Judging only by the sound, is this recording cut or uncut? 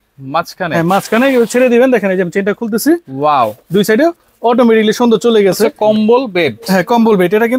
cut